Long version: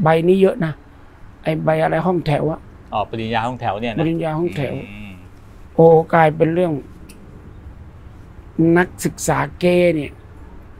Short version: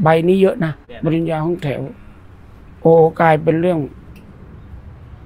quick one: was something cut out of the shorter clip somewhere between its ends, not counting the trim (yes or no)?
yes